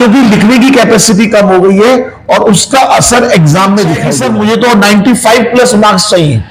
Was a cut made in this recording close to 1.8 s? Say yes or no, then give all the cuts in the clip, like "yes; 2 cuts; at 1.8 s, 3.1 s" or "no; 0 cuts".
no; 1 cut; at 4.1 s